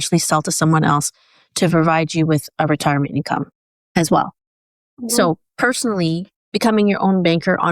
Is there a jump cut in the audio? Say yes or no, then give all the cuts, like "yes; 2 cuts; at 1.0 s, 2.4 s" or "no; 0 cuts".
yes; 1 cut; at 6.3 s